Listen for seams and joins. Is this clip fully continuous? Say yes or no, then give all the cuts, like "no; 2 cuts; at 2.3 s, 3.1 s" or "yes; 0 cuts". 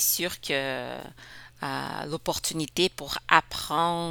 yes; 0 cuts